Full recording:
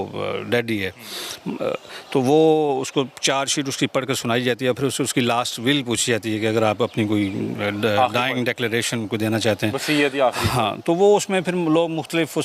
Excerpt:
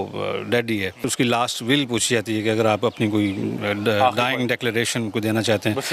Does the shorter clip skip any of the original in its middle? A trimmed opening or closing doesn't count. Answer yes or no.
yes